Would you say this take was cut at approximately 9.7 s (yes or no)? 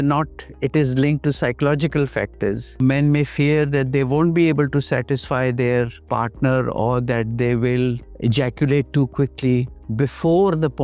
yes